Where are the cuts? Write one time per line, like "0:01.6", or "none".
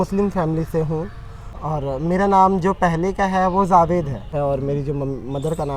none